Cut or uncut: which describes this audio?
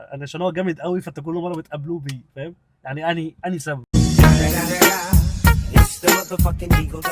uncut